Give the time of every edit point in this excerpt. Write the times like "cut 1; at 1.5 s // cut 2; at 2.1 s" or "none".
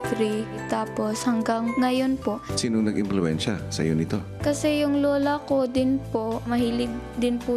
cut 1; at 4.3 s